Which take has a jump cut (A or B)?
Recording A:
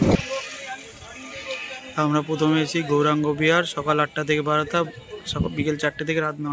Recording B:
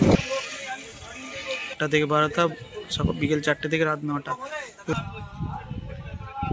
B